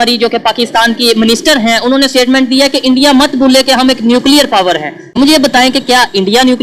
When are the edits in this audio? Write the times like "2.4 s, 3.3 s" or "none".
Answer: 5.1 s